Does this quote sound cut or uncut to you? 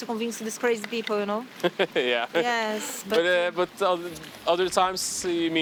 uncut